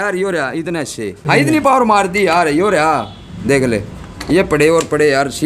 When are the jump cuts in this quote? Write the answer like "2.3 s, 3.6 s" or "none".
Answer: 1.3 s